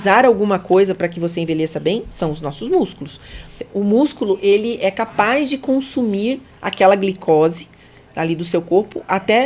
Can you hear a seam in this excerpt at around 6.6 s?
no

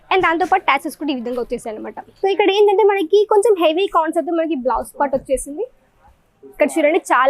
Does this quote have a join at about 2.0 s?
yes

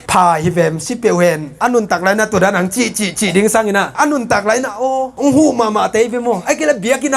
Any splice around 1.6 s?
yes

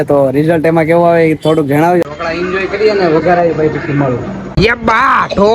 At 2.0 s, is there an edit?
yes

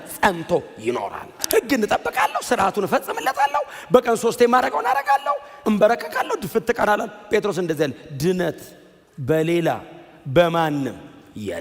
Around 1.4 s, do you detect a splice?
yes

